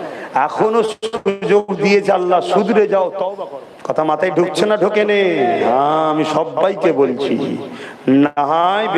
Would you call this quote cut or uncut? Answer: cut